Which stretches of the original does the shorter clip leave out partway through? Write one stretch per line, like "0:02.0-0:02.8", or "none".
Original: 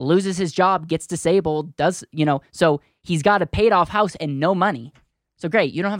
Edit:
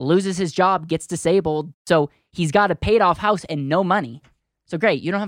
0:01.7-0:02.4